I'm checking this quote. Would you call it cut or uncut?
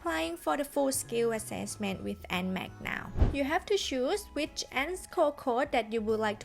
cut